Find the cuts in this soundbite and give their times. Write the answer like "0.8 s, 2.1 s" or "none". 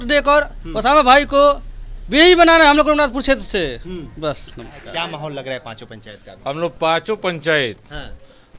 none